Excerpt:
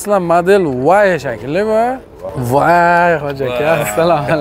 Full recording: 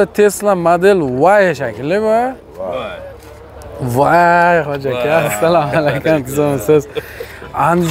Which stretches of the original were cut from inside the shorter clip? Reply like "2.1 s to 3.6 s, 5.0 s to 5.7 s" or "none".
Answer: 2.5 s to 3.6 s